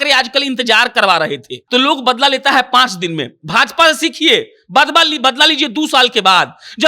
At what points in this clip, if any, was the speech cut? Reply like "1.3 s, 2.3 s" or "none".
1.6 s